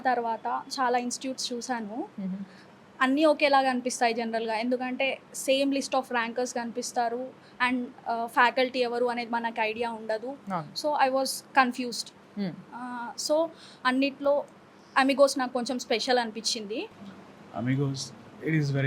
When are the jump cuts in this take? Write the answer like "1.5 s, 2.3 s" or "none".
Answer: 17.0 s

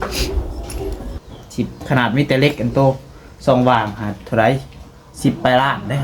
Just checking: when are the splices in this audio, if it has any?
1.1 s

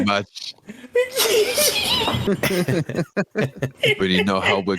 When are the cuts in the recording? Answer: 2.2 s

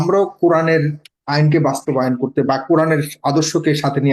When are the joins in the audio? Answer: none

